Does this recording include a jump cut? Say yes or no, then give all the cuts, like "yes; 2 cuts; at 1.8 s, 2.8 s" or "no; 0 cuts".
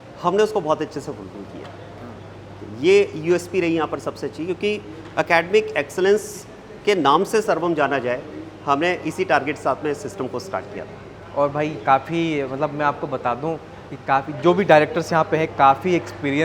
no; 0 cuts